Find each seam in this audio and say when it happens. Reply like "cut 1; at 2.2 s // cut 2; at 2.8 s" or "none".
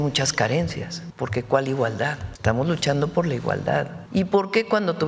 cut 1; at 1.0 s // cut 2; at 2.3 s // cut 3; at 4.0 s